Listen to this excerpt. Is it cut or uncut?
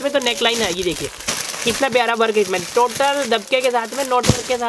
uncut